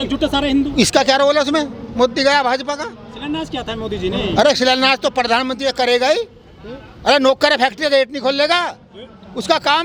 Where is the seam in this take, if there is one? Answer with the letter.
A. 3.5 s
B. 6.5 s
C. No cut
C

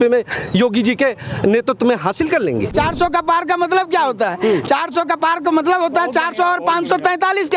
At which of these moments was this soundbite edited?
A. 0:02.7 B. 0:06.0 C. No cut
A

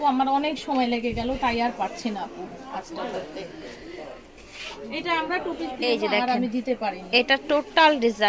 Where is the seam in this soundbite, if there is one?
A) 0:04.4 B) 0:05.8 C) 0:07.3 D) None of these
B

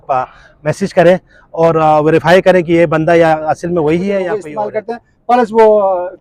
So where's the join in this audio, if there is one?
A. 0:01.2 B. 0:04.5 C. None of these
B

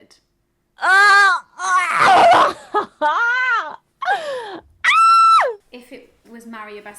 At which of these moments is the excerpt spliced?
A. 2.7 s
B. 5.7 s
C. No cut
B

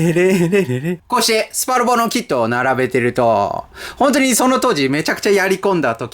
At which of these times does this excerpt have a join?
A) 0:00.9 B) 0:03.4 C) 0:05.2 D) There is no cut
A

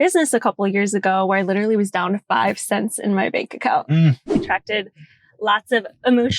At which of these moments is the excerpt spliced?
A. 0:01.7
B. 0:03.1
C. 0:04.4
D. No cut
C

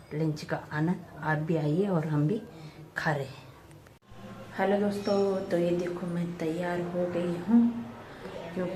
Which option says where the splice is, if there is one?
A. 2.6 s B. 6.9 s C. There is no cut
C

